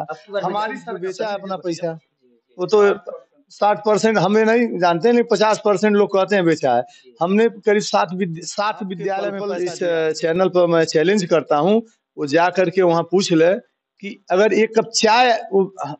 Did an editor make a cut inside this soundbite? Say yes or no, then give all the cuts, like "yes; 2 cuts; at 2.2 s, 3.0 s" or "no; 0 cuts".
yes; 2 cuts; at 0.9 s, 9.4 s